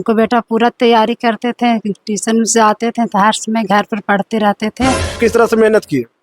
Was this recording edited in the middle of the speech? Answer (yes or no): yes